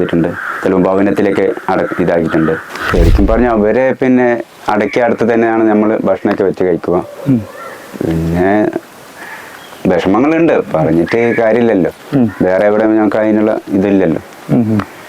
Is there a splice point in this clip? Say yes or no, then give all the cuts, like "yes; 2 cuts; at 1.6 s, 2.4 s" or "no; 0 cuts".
yes; 1 cut; at 2.7 s